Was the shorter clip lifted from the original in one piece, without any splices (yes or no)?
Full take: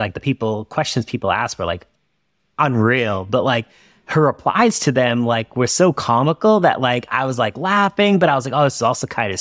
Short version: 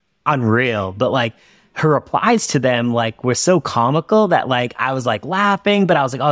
yes